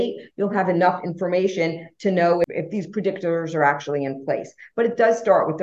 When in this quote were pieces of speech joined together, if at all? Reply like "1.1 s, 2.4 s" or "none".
2.5 s